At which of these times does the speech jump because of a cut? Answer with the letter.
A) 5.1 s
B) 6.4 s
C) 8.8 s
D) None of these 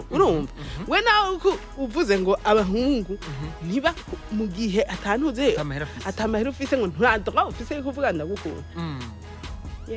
D